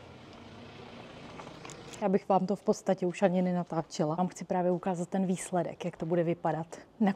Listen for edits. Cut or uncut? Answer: cut